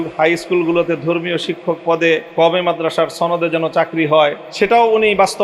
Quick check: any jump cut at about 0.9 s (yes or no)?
no